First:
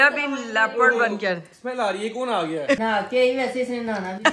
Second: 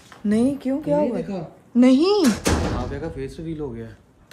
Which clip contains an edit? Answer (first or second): first